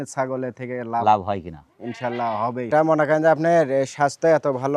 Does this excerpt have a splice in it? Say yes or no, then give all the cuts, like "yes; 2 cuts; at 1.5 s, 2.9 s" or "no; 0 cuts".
yes; 1 cut; at 2.7 s